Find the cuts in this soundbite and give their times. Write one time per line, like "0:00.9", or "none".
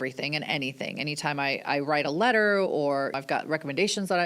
0:03.1